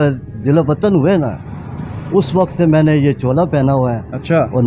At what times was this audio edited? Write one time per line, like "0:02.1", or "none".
none